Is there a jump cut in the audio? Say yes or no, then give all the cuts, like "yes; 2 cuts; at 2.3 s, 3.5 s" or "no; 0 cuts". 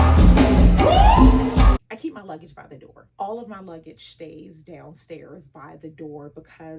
yes; 1 cut; at 1.7 s